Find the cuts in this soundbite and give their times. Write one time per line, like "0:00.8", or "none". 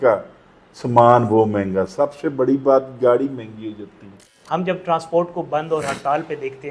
0:04.3

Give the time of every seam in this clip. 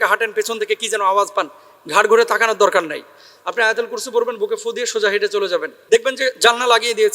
0:05.7

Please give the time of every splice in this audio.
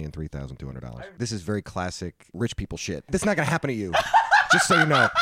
0:00.9
0:02.2
0:03.1

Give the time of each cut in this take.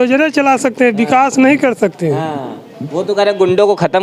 none

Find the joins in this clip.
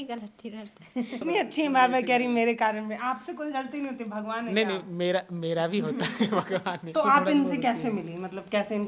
0:01.2
0:06.9

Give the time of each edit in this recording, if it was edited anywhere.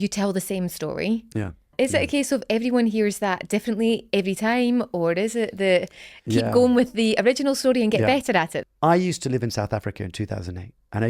0:01.7
0:08.5

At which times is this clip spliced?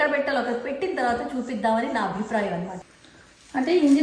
0:02.7

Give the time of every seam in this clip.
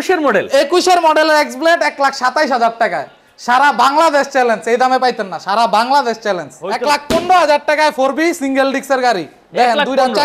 0:06.7

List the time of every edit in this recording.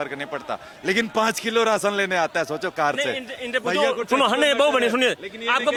none

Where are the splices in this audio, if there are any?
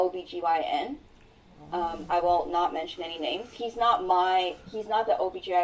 none

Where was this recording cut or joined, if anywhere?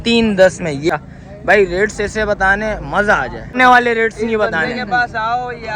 0:00.9
0:03.6

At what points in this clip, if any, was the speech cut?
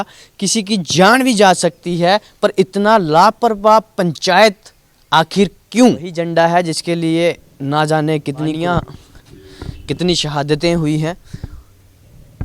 0:06.1
0:08.6

